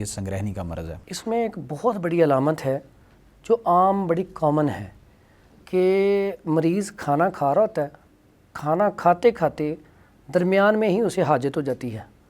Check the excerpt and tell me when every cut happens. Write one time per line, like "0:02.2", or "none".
none